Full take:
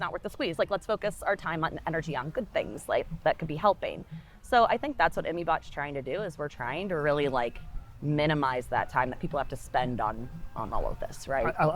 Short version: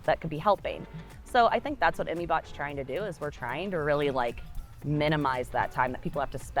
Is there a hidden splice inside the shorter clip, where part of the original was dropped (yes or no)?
no